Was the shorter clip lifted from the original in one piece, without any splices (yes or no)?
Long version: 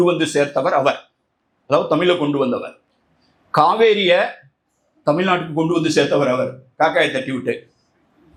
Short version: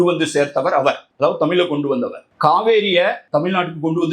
no